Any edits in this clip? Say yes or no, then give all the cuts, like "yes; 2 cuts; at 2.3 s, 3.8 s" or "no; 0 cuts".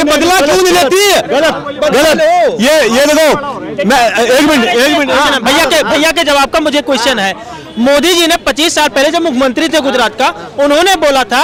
no; 0 cuts